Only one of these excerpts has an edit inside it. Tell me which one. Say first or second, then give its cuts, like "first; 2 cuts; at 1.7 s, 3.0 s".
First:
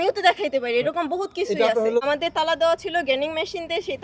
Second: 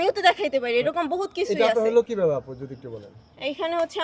first; 1 cut; at 2.0 s